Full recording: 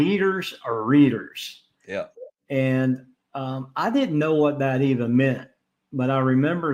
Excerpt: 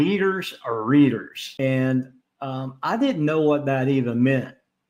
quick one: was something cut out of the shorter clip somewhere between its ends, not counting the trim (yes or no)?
yes